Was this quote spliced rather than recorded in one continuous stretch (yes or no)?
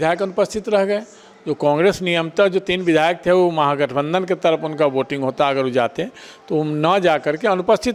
no